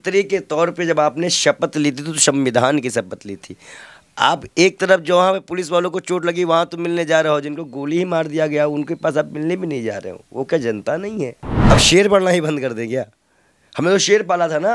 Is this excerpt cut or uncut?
cut